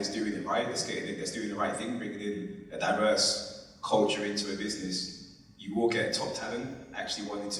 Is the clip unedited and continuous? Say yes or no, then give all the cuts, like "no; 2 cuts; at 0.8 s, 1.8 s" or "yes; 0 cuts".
yes; 0 cuts